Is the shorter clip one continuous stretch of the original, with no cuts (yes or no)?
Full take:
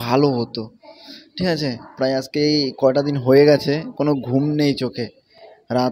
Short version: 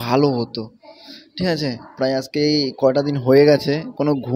yes